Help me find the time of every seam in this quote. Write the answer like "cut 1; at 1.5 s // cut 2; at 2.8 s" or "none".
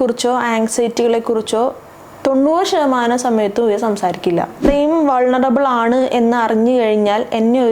cut 1; at 4.7 s